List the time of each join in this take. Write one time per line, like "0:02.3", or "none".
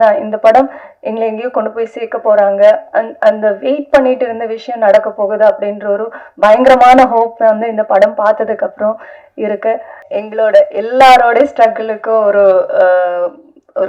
0:10.0